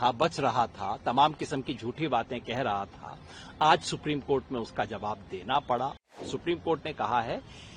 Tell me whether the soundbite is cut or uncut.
cut